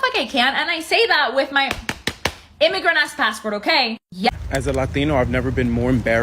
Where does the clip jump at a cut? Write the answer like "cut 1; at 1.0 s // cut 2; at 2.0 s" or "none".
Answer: cut 1; at 4.3 s